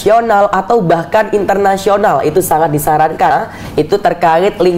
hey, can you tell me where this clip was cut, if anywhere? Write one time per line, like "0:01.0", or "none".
0:03.3